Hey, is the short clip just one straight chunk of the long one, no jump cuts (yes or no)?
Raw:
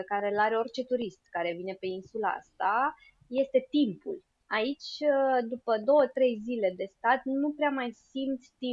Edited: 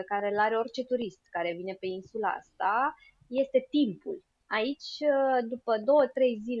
yes